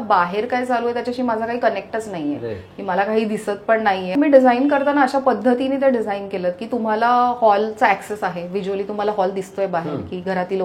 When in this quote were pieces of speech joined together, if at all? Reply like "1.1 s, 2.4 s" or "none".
4.1 s